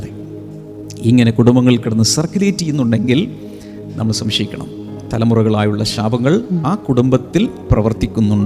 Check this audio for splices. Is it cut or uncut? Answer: uncut